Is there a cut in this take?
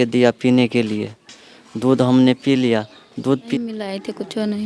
yes; 1 cut; at 3.5 s

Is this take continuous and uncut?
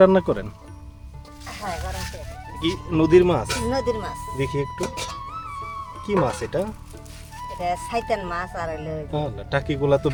yes; 0 cuts

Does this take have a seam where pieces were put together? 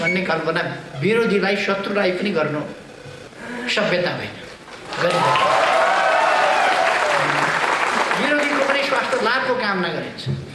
no; 0 cuts

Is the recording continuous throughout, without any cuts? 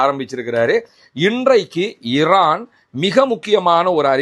no; 1 cut; at 0.9 s

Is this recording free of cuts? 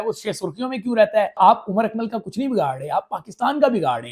no; 1 cut; at 1.4 s

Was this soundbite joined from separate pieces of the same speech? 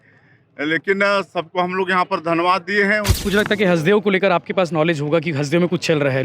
yes; 1 cut; at 3.1 s

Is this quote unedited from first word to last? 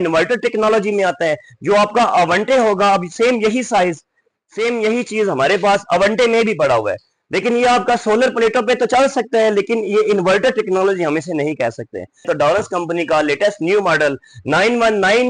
no; 1 cut; at 12.2 s

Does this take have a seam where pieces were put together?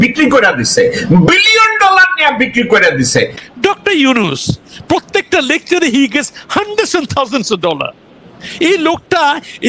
yes; 1 cut; at 3.4 s

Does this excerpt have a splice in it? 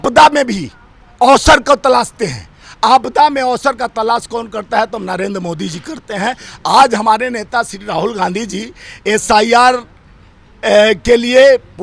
no; 0 cuts

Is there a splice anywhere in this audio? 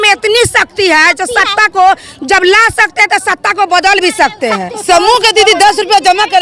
yes; 1 cut; at 4.7 s

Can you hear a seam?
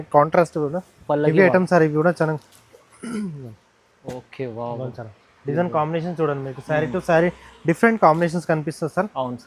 no; 0 cuts

